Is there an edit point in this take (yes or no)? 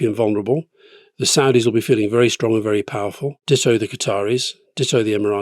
yes